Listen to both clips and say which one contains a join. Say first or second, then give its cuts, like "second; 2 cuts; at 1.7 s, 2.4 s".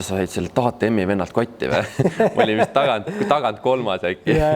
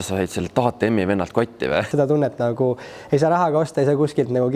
second; 1 cut; at 1.9 s